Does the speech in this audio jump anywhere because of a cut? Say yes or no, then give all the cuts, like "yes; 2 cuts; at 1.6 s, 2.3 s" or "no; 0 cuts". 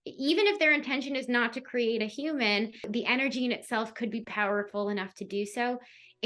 yes; 1 cut; at 2.9 s